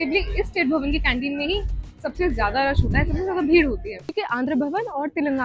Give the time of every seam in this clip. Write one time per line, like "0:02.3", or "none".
0:04.2